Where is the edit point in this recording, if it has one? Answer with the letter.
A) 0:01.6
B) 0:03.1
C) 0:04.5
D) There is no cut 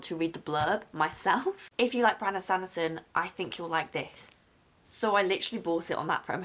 A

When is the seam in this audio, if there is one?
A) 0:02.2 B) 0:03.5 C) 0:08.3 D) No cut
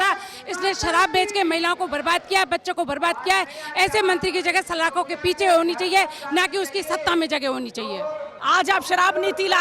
C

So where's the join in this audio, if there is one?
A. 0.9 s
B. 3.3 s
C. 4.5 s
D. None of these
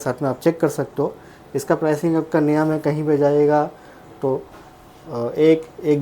D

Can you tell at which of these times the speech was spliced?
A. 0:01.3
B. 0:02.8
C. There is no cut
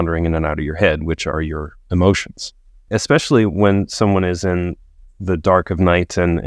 B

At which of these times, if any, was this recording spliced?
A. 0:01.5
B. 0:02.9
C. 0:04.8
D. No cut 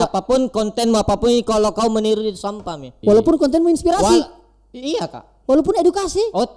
B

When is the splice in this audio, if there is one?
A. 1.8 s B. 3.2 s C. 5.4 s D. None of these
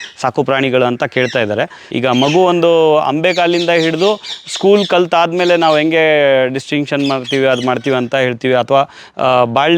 A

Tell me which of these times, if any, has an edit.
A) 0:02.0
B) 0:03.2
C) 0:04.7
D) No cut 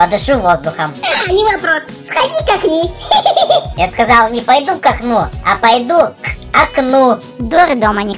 D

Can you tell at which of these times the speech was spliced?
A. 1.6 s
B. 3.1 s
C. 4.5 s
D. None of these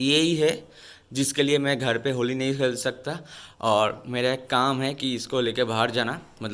D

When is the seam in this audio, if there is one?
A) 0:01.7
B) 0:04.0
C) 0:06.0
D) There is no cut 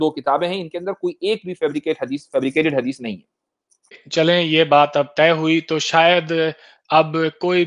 B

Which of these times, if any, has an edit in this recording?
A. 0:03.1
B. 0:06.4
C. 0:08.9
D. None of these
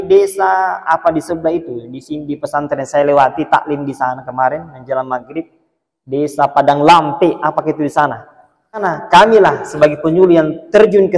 C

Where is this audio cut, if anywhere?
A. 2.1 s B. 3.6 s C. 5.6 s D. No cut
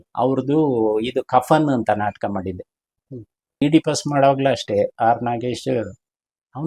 B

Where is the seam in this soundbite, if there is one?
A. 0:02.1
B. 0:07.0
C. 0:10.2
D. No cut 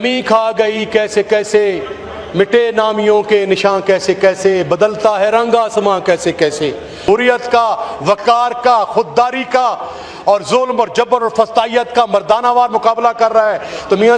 B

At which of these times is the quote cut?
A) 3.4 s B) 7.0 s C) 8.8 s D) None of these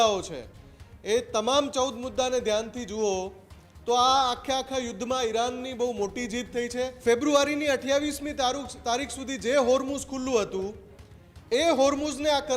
B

